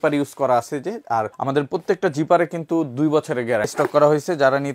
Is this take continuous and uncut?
no; 2 cuts; at 1.3 s, 3.7 s

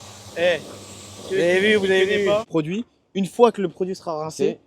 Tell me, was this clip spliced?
yes; 1 cut; at 2.5 s

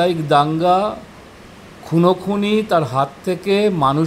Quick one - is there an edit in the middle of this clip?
no; 0 cuts

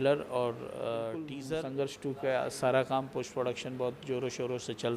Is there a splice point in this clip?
yes; 1 cut; at 1.4 s

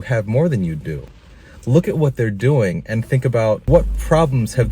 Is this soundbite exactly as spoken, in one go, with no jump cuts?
no; 1 cut; at 3.6 s

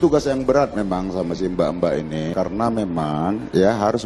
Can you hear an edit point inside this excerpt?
yes; 1 cut; at 2.3 s

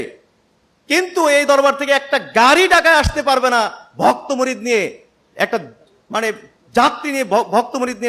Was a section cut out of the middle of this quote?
no; 0 cuts

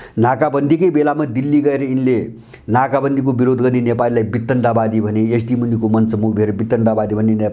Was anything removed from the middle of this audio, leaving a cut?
no; 0 cuts

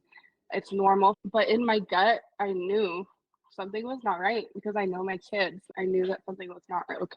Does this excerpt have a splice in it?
yes; 2 cuts; at 1.2 s, 5.6 s

